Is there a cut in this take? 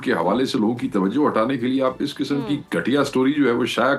no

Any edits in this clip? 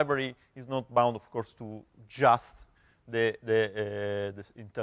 yes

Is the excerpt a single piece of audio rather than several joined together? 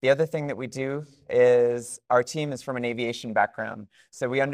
yes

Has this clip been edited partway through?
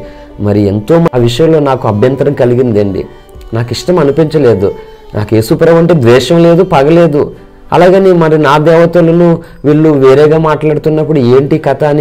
yes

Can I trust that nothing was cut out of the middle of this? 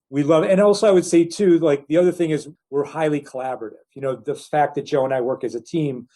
no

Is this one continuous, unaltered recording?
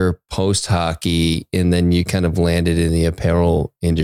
yes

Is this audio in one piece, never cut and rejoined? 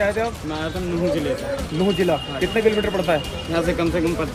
yes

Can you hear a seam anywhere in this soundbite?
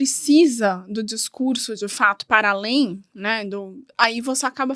no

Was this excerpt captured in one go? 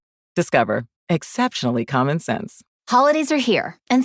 no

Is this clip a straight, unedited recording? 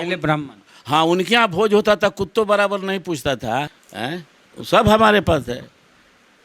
no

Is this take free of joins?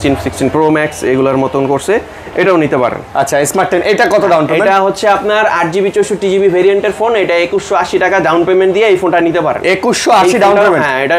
yes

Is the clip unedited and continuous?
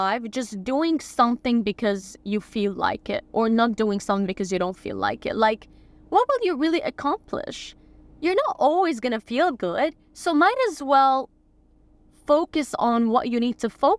yes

